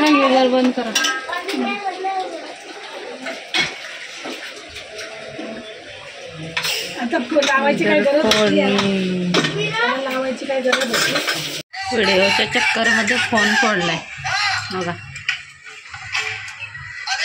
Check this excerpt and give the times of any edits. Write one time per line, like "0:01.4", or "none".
0:11.8